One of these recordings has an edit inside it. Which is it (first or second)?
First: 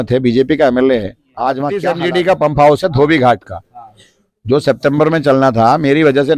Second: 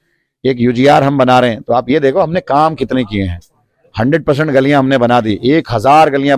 first